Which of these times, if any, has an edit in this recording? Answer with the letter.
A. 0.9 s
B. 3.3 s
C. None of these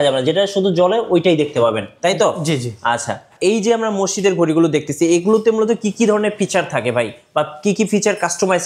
B